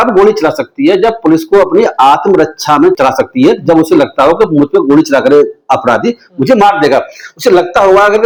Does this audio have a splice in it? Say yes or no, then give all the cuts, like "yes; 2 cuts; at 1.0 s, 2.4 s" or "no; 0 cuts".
no; 0 cuts